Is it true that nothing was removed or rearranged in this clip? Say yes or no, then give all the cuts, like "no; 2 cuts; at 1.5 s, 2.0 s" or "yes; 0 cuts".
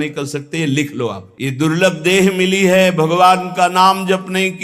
no; 1 cut; at 1.3 s